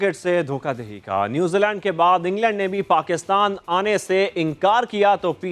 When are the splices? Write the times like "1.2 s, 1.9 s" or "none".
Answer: none

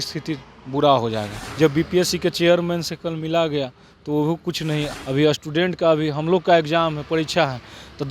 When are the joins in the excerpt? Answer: 1.4 s, 4.9 s

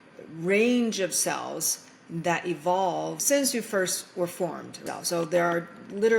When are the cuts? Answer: 3.2 s, 4.8 s

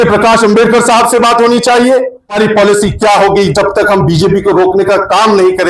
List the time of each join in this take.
2.4 s

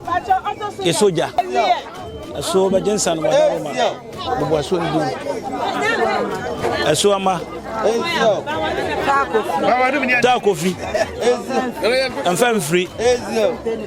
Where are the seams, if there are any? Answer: 1.4 s

